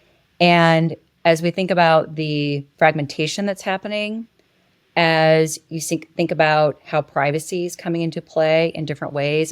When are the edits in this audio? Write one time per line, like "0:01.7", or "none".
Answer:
0:02.7